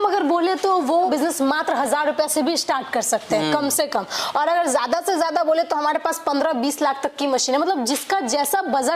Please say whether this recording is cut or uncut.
cut